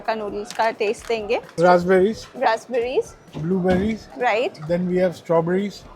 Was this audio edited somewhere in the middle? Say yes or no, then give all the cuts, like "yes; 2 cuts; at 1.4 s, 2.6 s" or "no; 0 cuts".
yes; 1 cut; at 1.5 s